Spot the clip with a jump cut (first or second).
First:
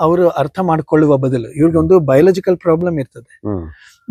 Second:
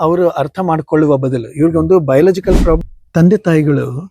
second